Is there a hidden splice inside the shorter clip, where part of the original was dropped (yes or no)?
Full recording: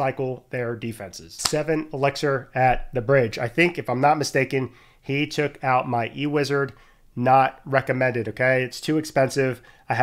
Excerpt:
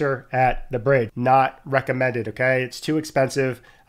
yes